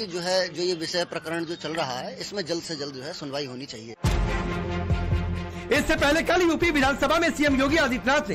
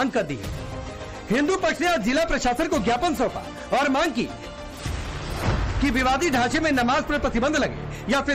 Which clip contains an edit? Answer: second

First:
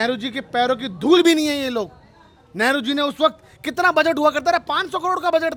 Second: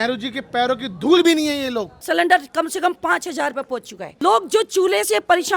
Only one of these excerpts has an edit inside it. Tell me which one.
second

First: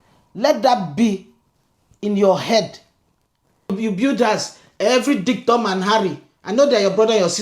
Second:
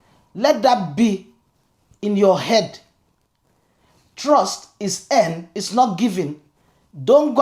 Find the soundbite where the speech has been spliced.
first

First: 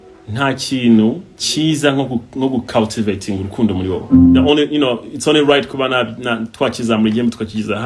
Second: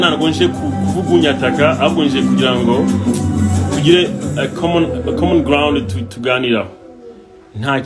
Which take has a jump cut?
first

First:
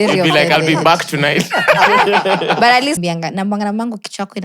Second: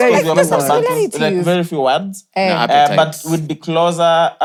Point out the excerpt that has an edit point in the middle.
first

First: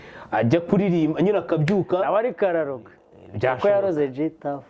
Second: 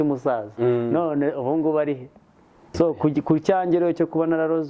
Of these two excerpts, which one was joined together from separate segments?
second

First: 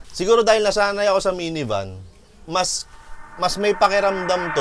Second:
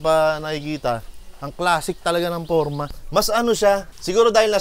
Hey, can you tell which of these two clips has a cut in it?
second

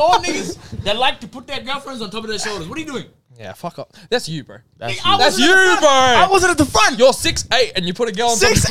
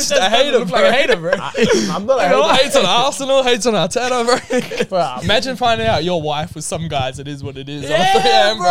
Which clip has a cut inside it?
second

